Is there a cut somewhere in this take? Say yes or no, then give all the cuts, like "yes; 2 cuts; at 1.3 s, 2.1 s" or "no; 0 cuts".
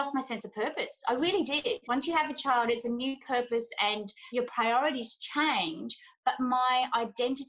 yes; 1 cut; at 1.8 s